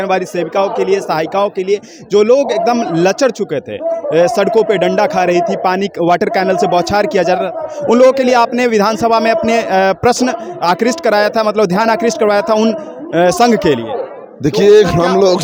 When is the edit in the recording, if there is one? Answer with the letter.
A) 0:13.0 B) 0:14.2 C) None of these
C